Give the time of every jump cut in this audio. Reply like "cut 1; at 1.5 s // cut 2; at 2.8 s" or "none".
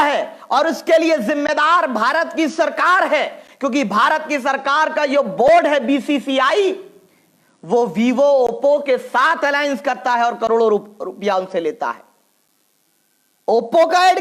none